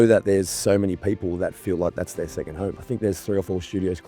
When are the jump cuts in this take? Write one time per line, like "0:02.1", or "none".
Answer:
0:02.8